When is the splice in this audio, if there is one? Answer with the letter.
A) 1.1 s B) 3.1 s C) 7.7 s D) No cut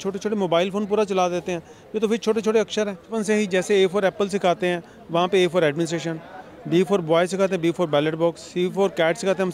B